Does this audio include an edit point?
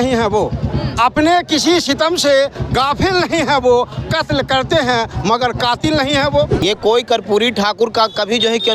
yes; 1 cut; at 6.5 s

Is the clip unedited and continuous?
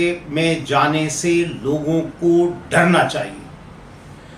yes; 0 cuts

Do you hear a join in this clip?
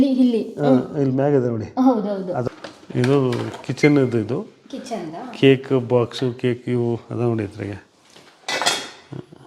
yes; 1 cut; at 2.4 s

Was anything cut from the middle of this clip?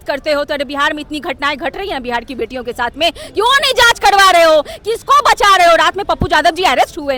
no; 0 cuts

